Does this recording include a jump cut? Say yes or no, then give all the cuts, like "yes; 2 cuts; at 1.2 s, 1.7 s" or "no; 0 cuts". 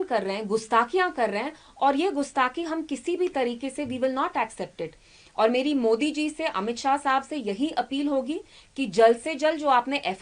no; 0 cuts